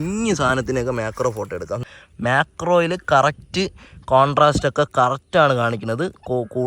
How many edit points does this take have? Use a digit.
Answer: 1